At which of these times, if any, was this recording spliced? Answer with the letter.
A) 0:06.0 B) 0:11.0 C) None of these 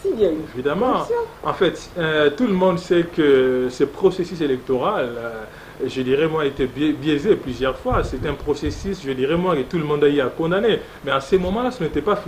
C